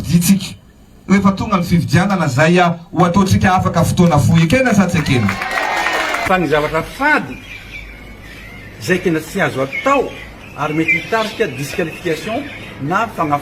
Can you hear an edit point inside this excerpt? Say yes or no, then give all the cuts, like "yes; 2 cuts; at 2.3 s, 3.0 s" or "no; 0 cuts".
yes; 2 cuts; at 2.1 s, 6.3 s